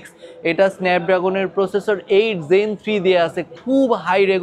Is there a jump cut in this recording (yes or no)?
no